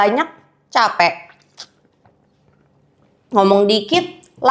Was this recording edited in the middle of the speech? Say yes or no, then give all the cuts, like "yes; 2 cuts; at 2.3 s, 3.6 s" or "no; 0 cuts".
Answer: no; 0 cuts